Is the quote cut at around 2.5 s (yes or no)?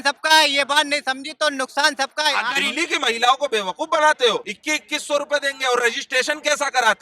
yes